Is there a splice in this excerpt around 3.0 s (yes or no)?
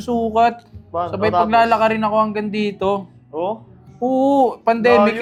no